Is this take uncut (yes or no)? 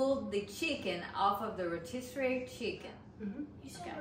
no